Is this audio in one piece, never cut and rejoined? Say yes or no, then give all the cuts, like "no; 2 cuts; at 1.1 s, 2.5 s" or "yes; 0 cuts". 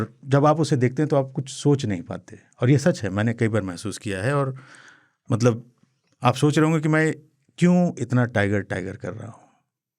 yes; 0 cuts